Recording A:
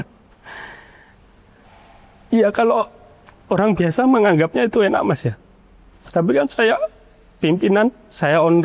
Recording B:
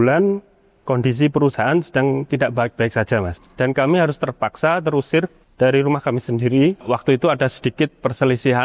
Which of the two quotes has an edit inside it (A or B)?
B